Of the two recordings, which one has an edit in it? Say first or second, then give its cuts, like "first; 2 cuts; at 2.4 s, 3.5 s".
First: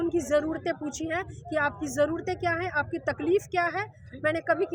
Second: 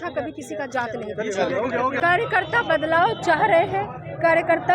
second; 1 cut; at 2.0 s